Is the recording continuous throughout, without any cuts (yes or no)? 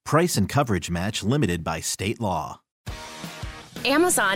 no